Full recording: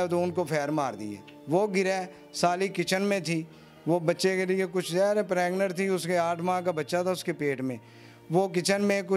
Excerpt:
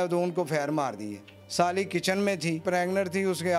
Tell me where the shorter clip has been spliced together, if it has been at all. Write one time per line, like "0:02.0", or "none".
0:01.3
0:02.6